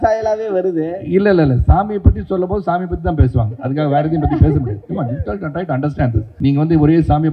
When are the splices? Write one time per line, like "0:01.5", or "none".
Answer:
0:06.2